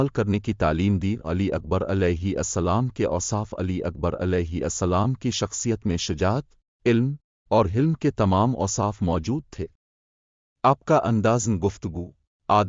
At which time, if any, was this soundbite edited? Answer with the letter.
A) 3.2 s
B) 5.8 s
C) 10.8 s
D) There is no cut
B